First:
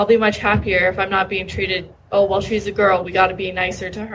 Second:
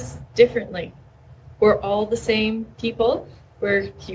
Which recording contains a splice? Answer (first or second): second